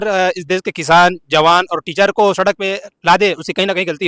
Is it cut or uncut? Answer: uncut